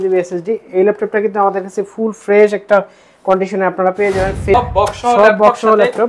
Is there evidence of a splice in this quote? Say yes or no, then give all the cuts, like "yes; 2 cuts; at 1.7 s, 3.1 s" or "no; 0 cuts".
yes; 1 cut; at 4.5 s